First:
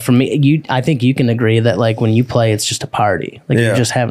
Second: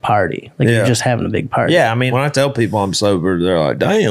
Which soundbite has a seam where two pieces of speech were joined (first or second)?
second